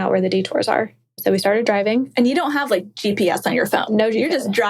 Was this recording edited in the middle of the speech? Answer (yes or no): yes